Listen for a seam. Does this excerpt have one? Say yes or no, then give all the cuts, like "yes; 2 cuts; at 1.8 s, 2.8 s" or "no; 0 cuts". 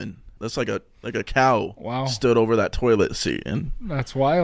no; 0 cuts